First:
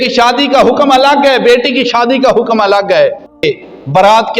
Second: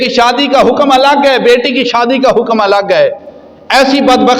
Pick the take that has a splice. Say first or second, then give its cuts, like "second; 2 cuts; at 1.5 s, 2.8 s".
first; 1 cut; at 3.4 s